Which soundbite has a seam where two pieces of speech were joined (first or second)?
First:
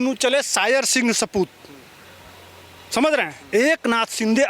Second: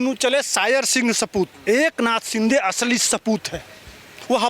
second